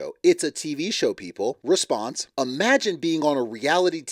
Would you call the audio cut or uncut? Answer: cut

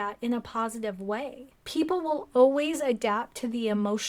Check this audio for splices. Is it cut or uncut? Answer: uncut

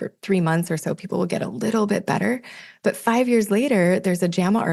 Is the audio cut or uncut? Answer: uncut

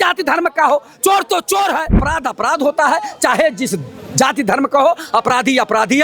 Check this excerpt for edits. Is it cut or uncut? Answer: cut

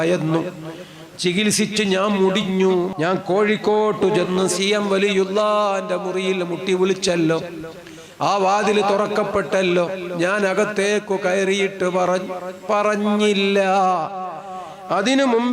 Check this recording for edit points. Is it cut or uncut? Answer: cut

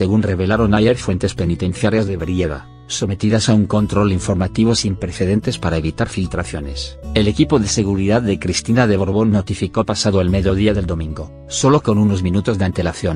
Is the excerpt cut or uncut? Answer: cut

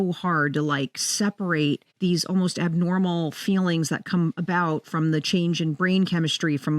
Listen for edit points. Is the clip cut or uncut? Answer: uncut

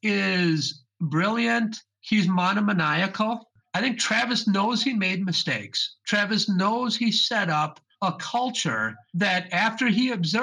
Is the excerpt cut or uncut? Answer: cut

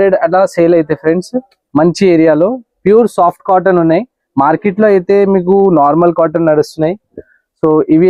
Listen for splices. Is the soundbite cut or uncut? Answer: uncut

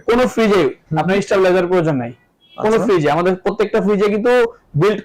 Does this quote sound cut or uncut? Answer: uncut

